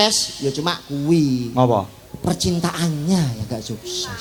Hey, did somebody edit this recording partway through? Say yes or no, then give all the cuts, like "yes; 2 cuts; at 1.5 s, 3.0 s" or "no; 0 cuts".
no; 0 cuts